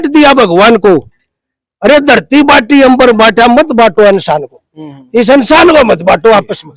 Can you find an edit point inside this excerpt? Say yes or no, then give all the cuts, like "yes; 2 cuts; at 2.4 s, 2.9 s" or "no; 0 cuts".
no; 0 cuts